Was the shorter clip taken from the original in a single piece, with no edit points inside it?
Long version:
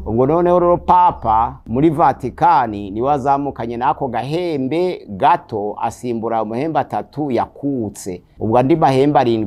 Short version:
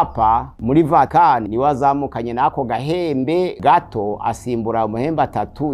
no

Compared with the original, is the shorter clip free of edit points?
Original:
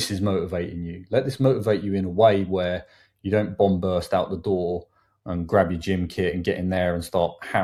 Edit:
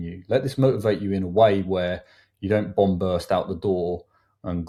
yes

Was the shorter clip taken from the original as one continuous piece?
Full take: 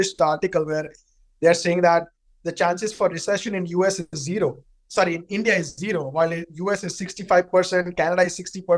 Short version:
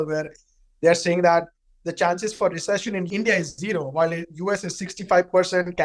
no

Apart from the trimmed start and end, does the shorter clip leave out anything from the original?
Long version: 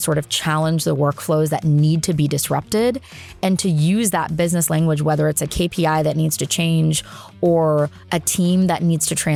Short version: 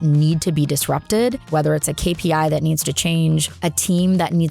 yes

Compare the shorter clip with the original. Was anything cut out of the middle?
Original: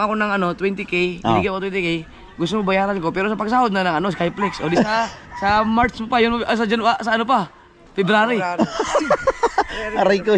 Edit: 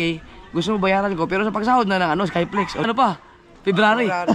yes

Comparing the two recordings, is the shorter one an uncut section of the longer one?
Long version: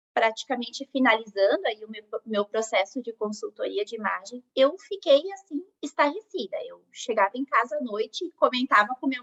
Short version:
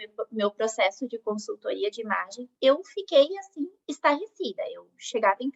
yes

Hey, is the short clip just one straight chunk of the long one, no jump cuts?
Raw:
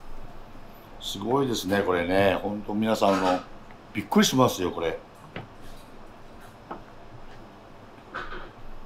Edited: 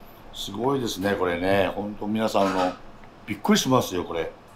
yes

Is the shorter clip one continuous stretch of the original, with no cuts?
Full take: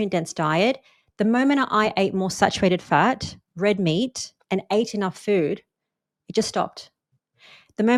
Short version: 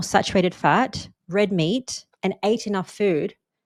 yes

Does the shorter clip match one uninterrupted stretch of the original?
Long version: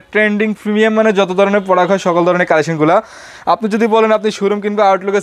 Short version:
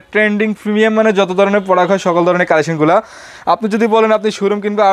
yes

